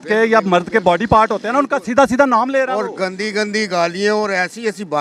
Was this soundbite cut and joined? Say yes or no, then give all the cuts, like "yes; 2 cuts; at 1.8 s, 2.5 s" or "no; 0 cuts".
no; 0 cuts